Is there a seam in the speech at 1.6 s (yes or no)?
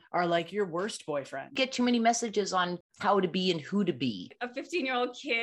yes